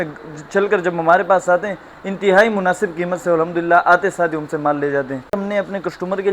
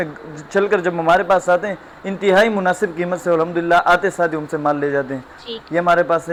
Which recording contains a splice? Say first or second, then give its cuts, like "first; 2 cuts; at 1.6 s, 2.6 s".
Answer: first; 1 cut; at 5.4 s